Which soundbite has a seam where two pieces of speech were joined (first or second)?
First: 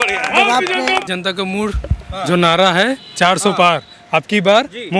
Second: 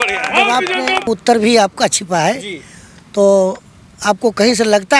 first